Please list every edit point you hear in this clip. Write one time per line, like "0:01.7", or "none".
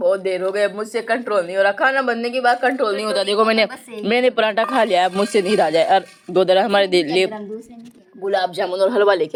none